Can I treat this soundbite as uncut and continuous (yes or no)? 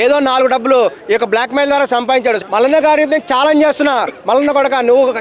no